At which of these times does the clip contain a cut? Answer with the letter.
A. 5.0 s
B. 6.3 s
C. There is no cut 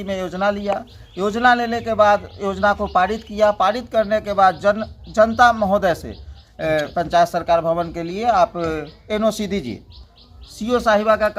B